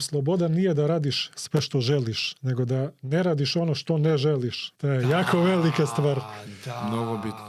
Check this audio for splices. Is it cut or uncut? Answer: cut